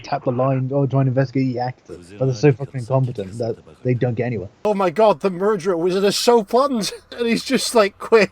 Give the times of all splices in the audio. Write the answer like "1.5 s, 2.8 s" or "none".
2.4 s, 4.5 s, 7.1 s